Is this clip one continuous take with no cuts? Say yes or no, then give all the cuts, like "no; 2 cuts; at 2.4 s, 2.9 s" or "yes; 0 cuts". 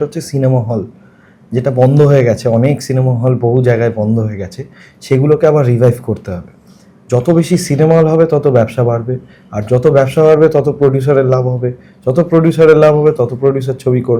yes; 0 cuts